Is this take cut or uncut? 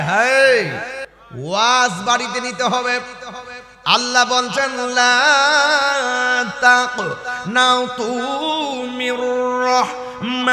uncut